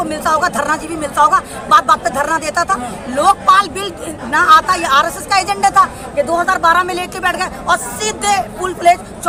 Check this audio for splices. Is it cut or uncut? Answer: uncut